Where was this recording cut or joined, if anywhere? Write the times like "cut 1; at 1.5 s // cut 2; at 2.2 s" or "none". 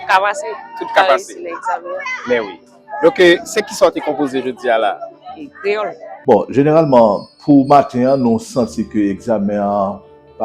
cut 1; at 6.1 s